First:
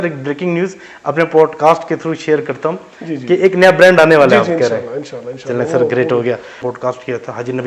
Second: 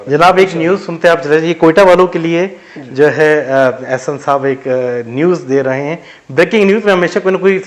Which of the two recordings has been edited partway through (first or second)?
first